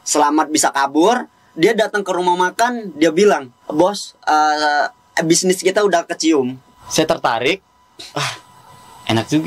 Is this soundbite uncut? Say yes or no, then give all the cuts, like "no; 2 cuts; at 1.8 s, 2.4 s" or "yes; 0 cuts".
no; 2 cuts; at 3.6 s, 6.6 s